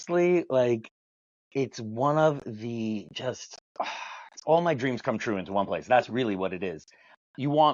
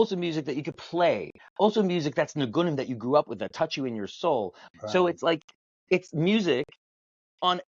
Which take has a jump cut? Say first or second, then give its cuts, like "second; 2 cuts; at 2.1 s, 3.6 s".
second; 1 cut; at 4.6 s